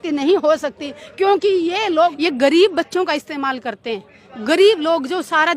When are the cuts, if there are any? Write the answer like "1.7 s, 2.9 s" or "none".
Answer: 2.2 s